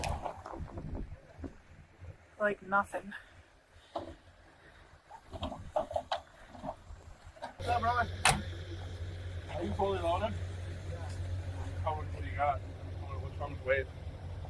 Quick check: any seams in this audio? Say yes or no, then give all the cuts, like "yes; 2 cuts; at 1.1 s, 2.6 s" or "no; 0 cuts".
yes; 1 cut; at 7.6 s